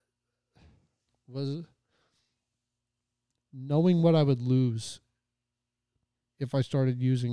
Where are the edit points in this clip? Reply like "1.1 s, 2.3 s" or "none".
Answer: 1.0 s